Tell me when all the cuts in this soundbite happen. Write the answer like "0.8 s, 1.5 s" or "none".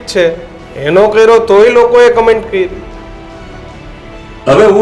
none